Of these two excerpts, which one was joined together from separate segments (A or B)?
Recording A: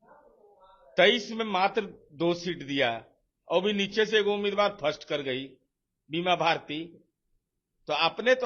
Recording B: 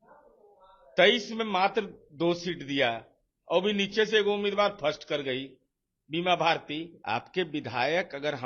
B